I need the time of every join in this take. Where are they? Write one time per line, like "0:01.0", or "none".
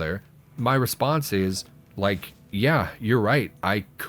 0:02.1